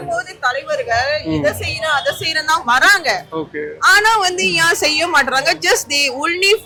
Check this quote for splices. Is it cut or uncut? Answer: uncut